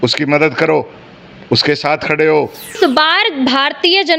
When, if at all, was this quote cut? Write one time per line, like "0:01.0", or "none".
0:02.8